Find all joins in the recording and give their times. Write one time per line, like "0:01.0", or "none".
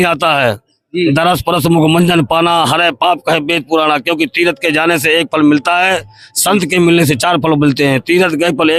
none